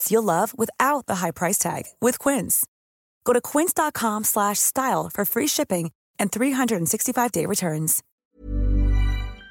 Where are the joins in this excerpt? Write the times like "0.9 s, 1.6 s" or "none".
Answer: 8.1 s

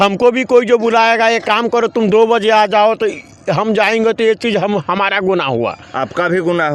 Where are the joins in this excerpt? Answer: none

